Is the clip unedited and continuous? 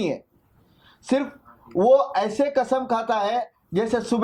yes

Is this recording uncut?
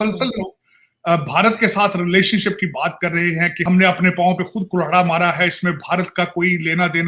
no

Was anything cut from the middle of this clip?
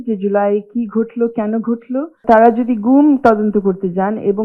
yes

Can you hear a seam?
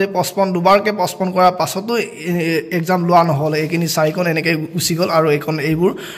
no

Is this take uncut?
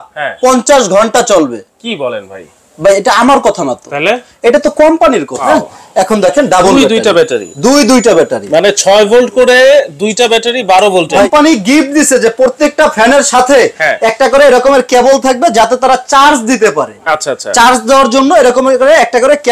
no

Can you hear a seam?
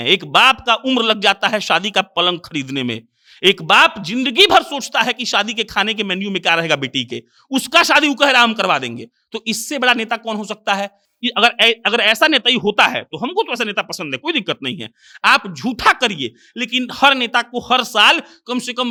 no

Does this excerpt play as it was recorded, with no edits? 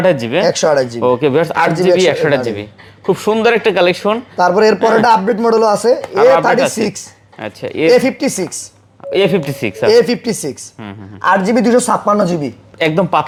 yes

